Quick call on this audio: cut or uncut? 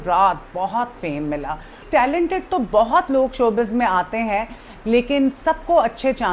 cut